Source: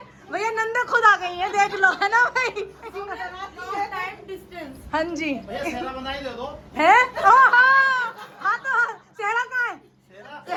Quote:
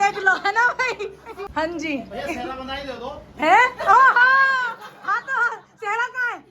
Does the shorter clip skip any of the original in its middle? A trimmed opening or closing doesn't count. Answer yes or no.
yes